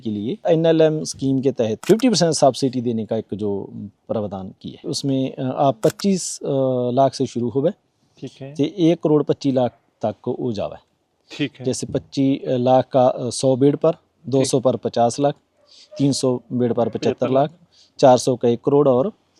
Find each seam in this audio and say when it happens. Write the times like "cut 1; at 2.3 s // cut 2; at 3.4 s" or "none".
none